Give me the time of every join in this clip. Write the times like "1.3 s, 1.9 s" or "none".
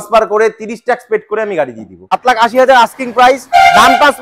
2.1 s